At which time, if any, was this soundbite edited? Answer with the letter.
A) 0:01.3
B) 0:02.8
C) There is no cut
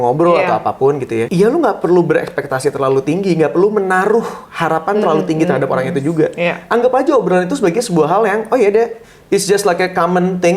A